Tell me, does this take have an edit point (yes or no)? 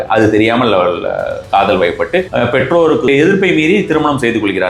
yes